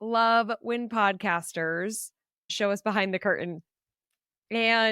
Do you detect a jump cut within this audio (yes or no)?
yes